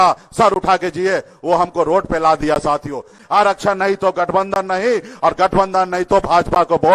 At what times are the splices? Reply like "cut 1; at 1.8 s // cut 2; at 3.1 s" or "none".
cut 1; at 3.1 s